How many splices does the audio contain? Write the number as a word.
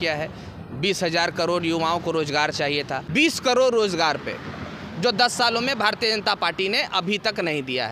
one